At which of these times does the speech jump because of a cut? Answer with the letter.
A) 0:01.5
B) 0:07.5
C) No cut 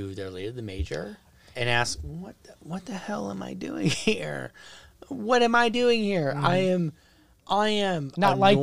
A